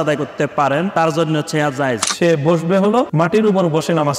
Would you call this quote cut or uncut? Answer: cut